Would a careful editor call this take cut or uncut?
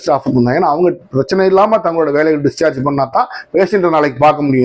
uncut